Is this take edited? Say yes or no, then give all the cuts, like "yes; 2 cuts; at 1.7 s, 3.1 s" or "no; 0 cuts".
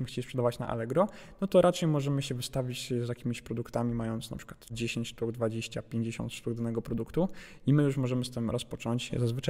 no; 0 cuts